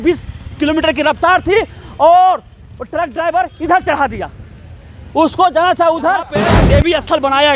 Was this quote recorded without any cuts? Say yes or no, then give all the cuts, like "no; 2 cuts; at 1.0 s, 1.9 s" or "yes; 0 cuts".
no; 1 cut; at 6.6 s